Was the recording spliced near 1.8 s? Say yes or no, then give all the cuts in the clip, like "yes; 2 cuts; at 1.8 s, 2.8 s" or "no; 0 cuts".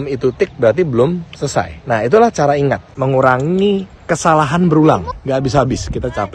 yes; 3 cuts; at 1.8 s, 2.9 s, 5.1 s